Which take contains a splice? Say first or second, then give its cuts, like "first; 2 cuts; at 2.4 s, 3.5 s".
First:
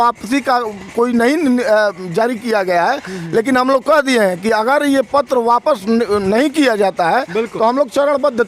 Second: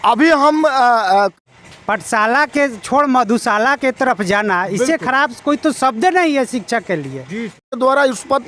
second; 2 cuts; at 1.3 s, 7.8 s